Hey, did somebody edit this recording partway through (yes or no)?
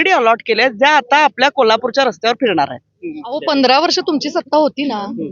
yes